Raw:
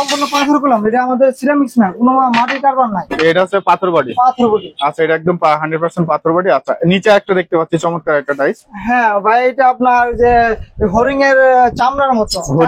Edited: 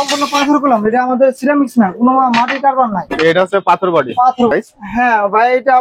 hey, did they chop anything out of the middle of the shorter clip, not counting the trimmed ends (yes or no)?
yes